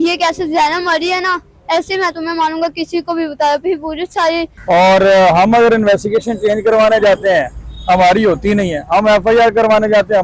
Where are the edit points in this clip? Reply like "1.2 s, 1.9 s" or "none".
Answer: 4.5 s